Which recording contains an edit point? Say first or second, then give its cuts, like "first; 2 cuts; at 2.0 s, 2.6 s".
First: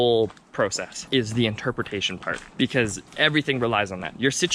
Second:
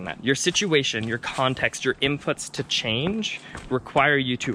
first; 3 cuts; at 0.9 s, 2.4 s, 3.0 s